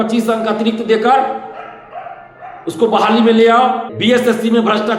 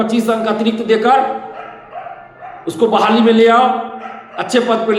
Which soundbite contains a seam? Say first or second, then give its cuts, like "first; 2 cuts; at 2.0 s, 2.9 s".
first; 1 cut; at 3.9 s